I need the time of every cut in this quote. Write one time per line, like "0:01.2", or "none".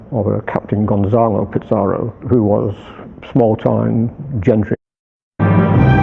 none